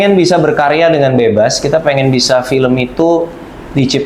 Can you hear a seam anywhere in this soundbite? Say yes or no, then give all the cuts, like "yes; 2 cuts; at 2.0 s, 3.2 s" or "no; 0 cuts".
no; 0 cuts